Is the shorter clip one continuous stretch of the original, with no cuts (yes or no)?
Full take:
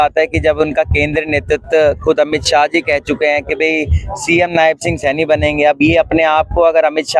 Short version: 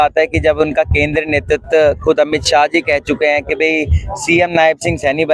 yes